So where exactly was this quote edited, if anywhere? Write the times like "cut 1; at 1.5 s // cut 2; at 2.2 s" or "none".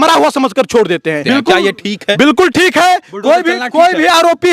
cut 1; at 1.2 s